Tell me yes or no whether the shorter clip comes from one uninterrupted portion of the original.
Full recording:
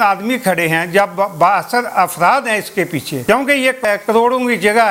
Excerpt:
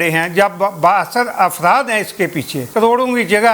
no